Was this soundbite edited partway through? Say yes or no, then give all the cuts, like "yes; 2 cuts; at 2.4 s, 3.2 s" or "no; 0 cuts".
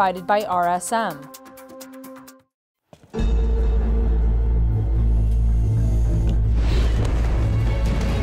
yes; 2 cuts; at 1.2 s, 2.3 s